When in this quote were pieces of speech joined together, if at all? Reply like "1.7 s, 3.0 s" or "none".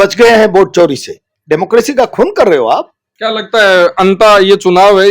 1.2 s, 3.0 s